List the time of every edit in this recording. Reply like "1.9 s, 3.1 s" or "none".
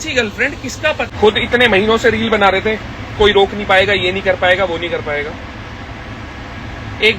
1.1 s

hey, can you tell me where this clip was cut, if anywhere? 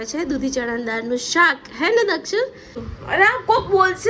2.7 s

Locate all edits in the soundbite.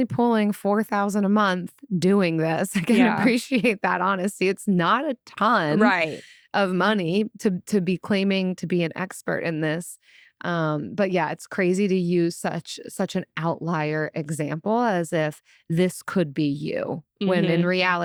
none

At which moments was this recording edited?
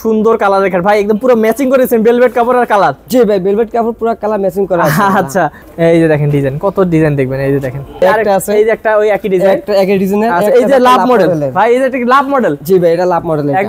5.6 s, 8.0 s

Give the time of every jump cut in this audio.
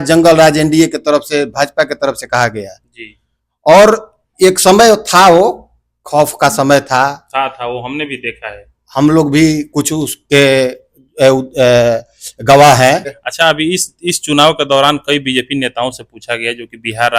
13.2 s

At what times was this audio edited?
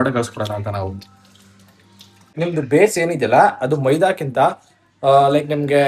2.3 s

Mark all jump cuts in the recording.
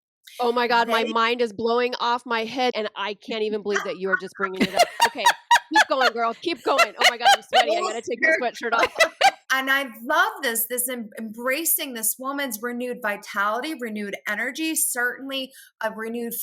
2.7 s, 9.4 s

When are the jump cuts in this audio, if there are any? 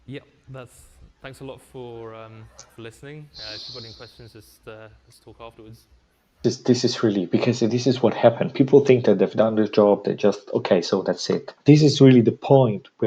6.4 s, 11.5 s

